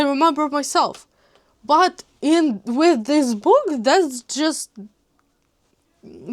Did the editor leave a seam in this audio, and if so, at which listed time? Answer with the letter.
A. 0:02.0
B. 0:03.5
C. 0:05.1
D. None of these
D